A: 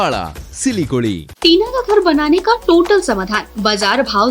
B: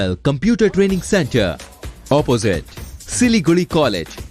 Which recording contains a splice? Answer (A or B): A